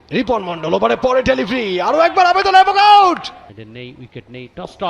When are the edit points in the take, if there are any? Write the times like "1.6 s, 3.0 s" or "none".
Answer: 3.5 s